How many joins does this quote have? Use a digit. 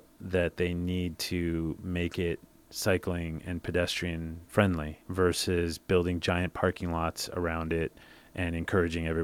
2